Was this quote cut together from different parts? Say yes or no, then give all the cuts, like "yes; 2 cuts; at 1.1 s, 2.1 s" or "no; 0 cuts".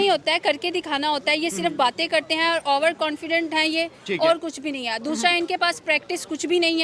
no; 0 cuts